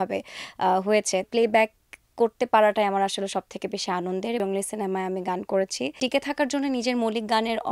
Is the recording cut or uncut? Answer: cut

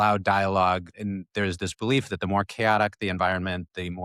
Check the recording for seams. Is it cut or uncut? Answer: cut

